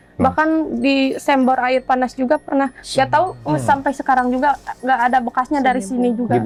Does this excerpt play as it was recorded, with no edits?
yes; 0 cuts

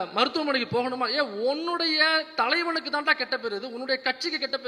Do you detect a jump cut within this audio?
no; 0 cuts

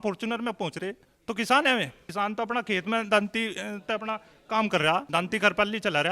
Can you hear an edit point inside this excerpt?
yes; 3 cuts; at 1.1 s, 2.0 s, 5.1 s

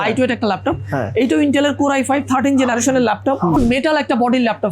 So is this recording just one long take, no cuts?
no; 1 cut; at 3.6 s

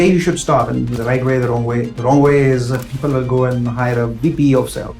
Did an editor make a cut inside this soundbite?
yes; 2 cuts; at 1.0 s, 2.0 s

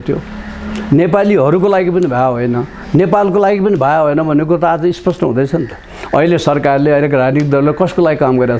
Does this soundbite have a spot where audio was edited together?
no; 0 cuts

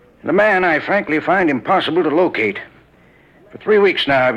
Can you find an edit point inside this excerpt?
no; 0 cuts

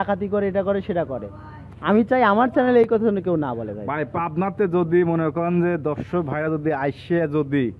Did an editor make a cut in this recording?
no; 0 cuts

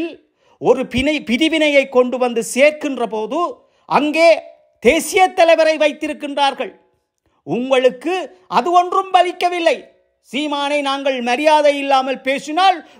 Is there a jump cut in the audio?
no; 0 cuts

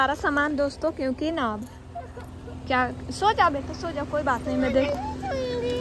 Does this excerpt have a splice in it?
no; 0 cuts

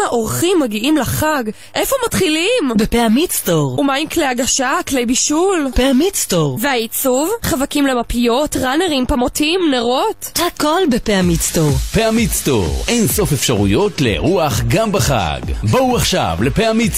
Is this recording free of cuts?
yes; 0 cuts

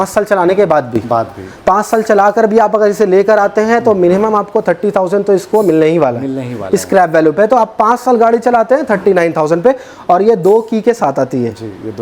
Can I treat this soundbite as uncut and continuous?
yes; 0 cuts

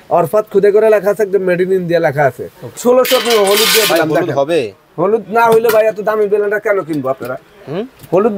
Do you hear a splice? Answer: yes; 1 cut; at 2.8 s

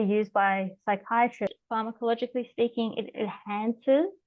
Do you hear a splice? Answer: yes; 1 cut; at 1.6 s

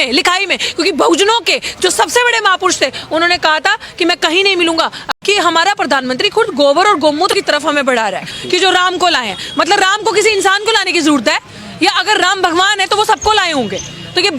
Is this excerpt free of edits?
no; 3 cuts; at 5.1 s, 7.3 s, 8.3 s

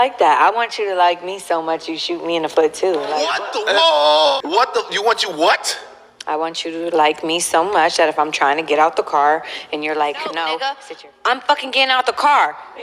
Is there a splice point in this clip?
yes; 3 cuts; at 3.2 s, 4.4 s, 10.8 s

